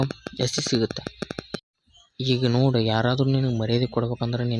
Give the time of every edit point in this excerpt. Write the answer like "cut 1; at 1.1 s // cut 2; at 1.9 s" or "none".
cut 1; at 1.6 s